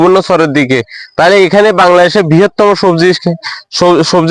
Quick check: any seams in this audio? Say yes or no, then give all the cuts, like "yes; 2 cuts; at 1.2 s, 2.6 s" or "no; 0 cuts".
no; 0 cuts